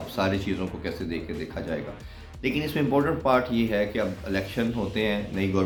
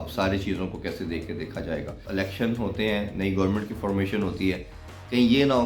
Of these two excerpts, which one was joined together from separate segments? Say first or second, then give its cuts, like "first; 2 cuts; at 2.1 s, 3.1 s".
second; 1 cut; at 2.0 s